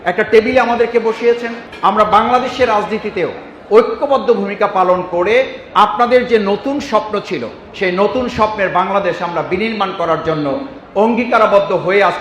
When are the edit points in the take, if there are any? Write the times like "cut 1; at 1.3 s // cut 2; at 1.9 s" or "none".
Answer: none